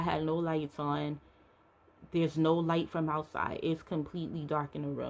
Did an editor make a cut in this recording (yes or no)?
no